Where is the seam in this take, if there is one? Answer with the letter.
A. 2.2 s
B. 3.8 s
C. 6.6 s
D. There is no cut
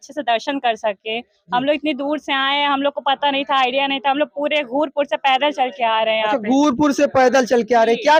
D